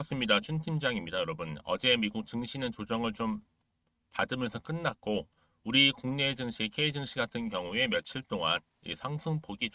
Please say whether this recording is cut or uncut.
uncut